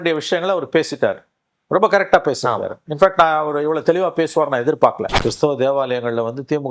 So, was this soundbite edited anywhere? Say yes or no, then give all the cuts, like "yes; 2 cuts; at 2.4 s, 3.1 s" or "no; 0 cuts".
yes; 1 cut; at 5.1 s